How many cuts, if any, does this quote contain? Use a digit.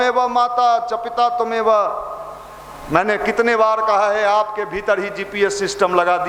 0